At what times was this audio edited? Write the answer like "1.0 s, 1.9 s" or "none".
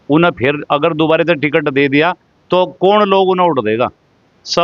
none